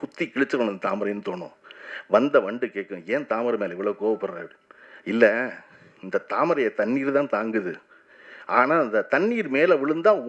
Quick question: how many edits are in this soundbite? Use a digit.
0